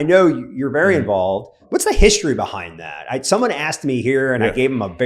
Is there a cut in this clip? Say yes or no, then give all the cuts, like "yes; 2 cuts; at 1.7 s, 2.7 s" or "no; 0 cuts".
yes; 1 cut; at 1.6 s